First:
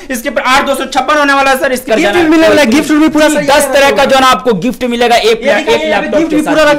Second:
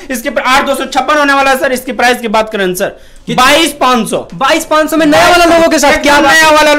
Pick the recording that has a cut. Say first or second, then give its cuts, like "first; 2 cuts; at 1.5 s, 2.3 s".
first; 1 cut; at 1.9 s